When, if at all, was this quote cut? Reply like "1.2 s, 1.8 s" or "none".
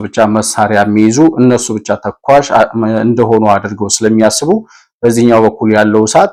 none